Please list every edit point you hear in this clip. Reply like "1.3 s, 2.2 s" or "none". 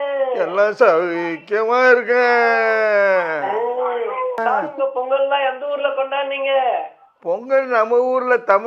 4.4 s

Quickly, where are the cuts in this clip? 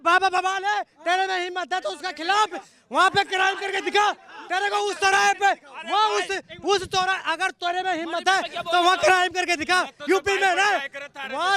none

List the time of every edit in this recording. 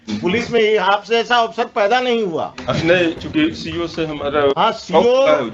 none

